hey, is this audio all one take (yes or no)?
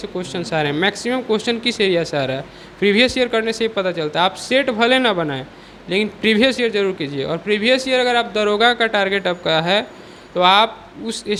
yes